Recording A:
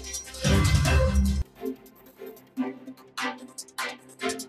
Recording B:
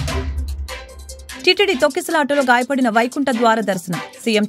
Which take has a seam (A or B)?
A